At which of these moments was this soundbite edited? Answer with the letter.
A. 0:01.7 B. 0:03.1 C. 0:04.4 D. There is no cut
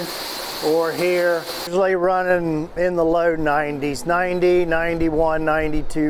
A